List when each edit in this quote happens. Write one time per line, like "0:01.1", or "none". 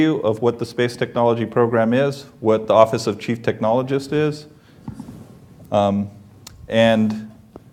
0:02.4